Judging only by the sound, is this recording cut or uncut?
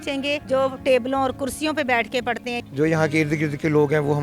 cut